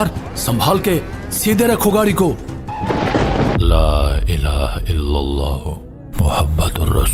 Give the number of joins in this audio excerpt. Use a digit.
1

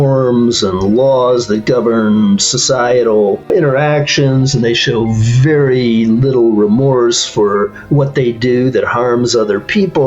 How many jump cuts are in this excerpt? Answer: 1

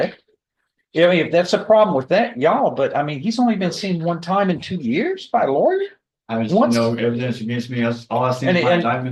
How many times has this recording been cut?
0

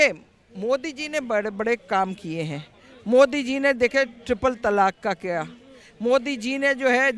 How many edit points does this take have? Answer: 0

